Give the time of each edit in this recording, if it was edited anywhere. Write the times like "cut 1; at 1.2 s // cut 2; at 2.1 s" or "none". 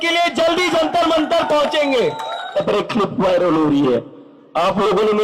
cut 1; at 2.6 s